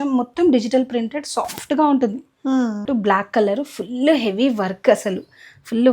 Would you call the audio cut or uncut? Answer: cut